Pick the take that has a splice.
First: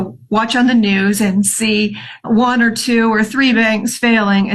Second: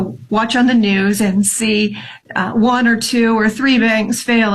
first; 1 cut; at 2.1 s

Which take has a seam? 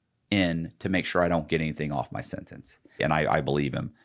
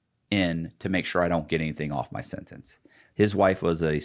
first; 1 cut; at 3.0 s

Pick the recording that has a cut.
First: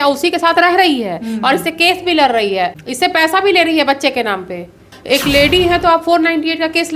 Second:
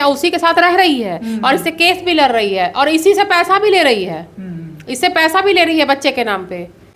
first; 2 cuts; at 2.7 s, 5.0 s

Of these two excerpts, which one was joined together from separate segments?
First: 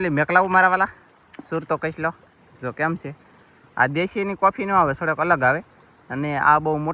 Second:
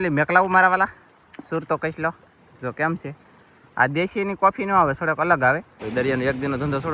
second; 1 cut; at 5.7 s

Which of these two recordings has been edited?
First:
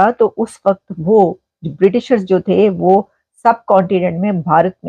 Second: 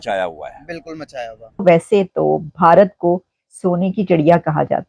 second; 1 cut; at 1.5 s

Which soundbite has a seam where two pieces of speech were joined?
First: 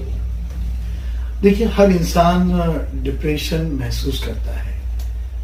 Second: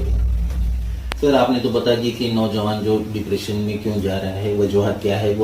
second; 1 cut; at 1.2 s

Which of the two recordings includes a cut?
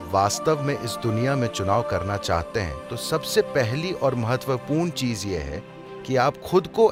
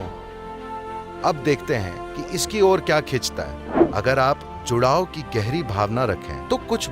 second; 1 cut; at 3.8 s

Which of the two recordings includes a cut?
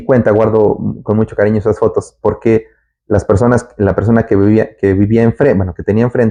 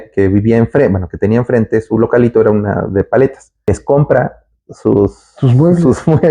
second; 1 cut; at 3.7 s

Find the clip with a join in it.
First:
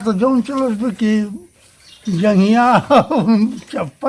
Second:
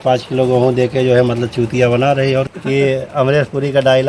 second; 1 cut; at 2.5 s

